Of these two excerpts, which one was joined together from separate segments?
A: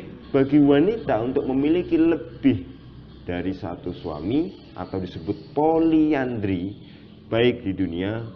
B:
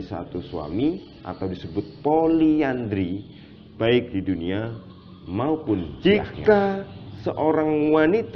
B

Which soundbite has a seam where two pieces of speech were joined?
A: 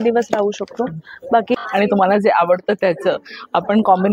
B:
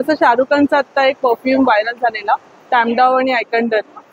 A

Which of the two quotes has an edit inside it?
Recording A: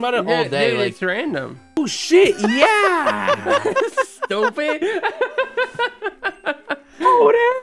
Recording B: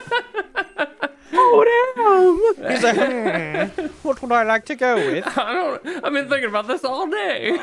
A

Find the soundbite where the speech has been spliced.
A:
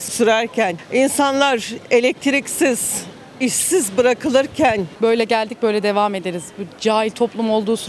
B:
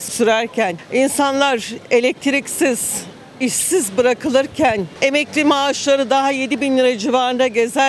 A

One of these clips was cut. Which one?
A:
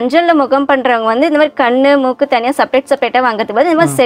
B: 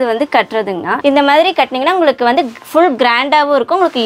B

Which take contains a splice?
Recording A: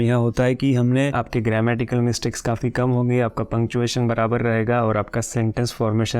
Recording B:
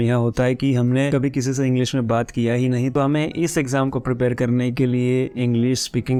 A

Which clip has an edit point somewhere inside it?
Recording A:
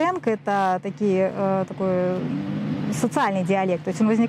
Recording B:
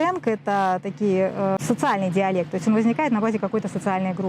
B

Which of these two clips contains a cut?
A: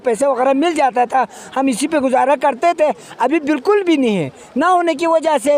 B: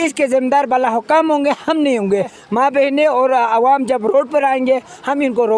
B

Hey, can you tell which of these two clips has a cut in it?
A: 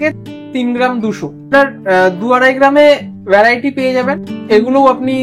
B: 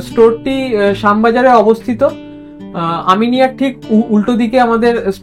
A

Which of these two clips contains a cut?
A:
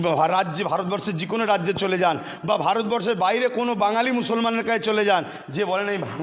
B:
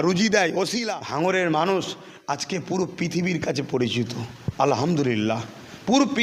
B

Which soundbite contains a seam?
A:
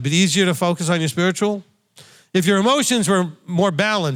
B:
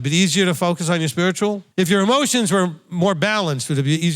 B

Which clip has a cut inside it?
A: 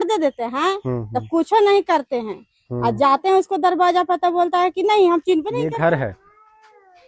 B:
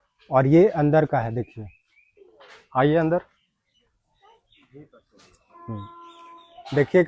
A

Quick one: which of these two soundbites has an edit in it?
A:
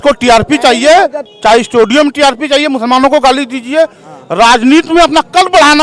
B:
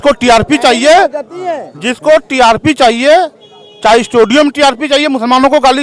A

